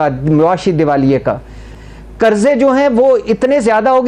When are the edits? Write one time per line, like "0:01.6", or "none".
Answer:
0:01.7